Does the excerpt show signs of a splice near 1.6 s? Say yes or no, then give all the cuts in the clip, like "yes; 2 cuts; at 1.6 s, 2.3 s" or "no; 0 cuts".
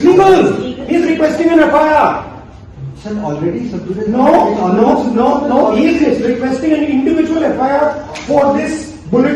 no; 0 cuts